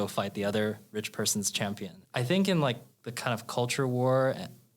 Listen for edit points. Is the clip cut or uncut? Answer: cut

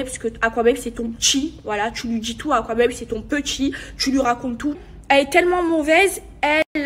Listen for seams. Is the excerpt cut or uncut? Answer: cut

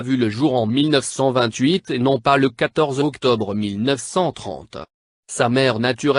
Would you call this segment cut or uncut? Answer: uncut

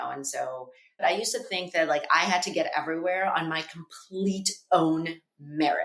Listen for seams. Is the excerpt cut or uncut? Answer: cut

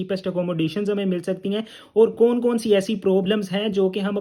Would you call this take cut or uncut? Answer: uncut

